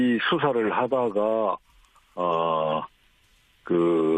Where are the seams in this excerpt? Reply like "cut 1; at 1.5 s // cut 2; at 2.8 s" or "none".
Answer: none